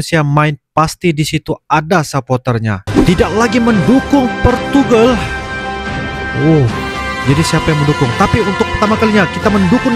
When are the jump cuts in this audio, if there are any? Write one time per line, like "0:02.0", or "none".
0:02.8